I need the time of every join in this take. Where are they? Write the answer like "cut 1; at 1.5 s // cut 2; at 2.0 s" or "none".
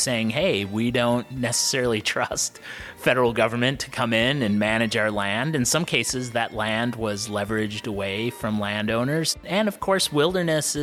cut 1; at 9.4 s